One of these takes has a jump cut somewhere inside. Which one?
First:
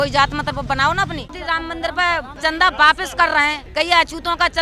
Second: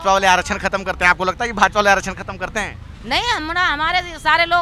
first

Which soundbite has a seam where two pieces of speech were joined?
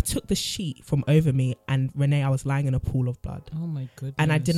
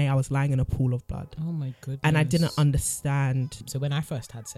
second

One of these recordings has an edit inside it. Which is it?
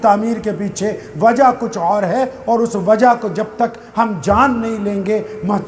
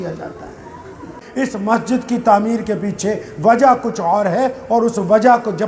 second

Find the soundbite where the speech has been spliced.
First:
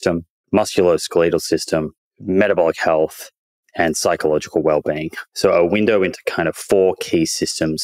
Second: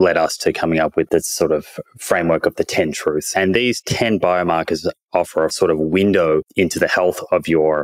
second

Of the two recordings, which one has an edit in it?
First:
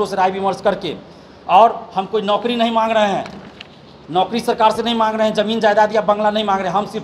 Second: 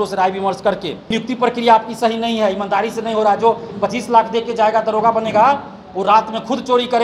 second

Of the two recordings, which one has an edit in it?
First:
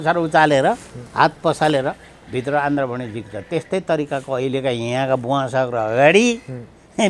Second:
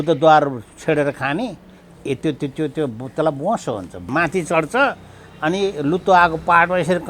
second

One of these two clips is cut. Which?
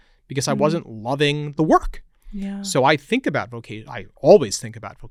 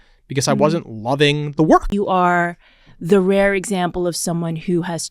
second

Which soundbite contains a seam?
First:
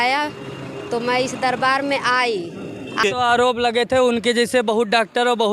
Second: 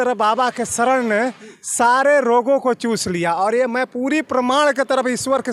first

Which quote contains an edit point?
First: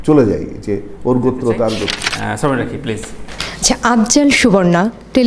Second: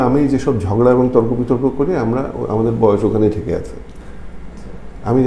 first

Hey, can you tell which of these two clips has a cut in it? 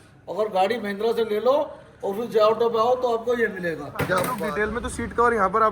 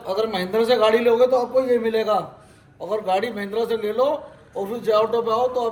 first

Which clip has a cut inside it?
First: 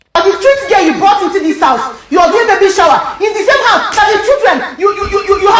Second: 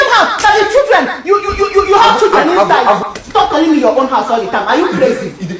second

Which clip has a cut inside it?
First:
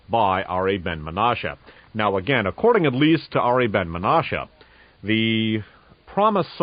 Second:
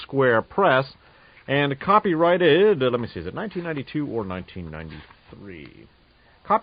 second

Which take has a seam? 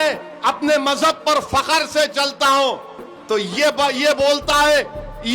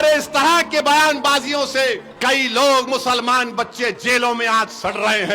second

